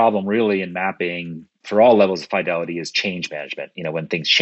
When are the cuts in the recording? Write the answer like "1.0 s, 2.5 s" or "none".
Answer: none

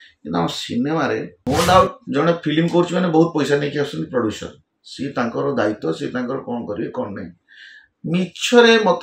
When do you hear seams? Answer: 1.3 s

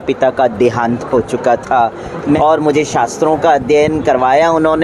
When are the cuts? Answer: 2.4 s

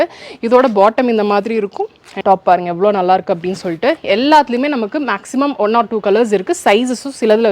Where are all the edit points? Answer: 2.0 s

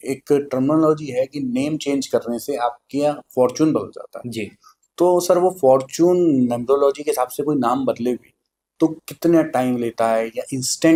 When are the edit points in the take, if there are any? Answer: none

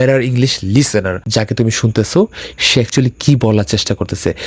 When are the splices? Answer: 1.2 s

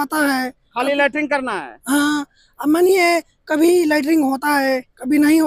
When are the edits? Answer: none

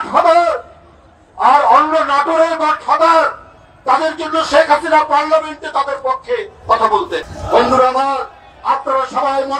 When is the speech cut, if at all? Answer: 7.3 s

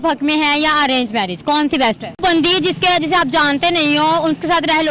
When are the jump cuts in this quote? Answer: 2.2 s

